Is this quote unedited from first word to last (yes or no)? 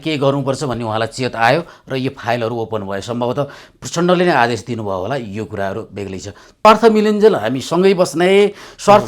no